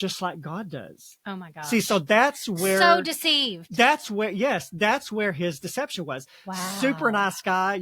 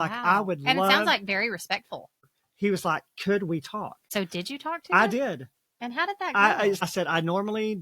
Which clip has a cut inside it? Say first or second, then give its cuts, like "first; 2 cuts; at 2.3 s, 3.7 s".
second; 3 cuts; at 2.1 s, 4.0 s, 6.8 s